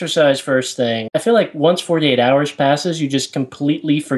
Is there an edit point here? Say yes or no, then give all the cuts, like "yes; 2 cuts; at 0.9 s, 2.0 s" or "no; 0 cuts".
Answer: yes; 1 cut; at 1.1 s